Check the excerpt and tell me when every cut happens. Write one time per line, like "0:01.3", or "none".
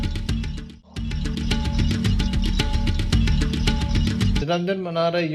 0:03.4
0:04.4